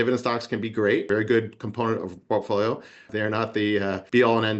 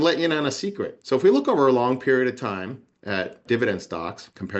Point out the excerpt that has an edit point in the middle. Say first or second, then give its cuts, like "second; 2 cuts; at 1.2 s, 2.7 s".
second; 1 cut; at 0.9 s